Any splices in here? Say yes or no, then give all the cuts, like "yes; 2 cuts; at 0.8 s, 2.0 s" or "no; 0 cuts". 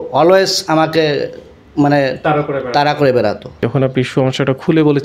yes; 1 cut; at 3.6 s